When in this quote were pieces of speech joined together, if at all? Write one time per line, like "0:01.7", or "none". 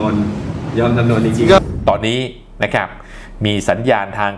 0:01.7